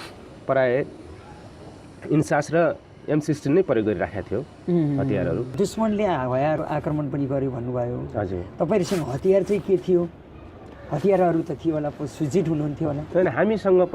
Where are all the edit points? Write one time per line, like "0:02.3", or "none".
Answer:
none